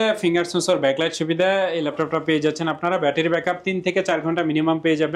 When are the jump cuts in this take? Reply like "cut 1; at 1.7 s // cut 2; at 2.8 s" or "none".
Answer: none